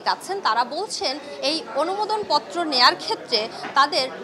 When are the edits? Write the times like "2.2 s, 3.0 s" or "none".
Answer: none